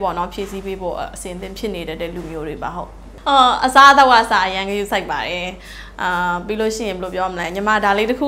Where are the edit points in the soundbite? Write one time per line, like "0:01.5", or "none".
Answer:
0:03.0